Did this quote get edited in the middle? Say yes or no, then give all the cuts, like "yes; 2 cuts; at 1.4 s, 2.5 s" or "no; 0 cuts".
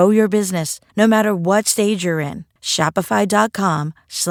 no; 0 cuts